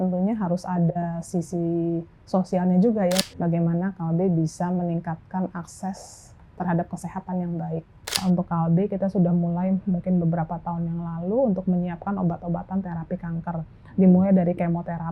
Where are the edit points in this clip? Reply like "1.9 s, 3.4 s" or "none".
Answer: 3.2 s, 8.2 s